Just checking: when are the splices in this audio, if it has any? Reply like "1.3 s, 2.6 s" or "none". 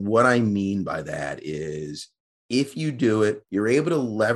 3.4 s